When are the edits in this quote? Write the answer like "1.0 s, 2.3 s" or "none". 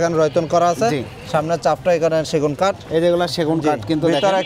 none